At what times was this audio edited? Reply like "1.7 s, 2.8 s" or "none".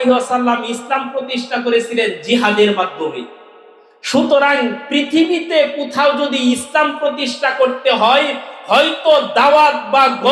none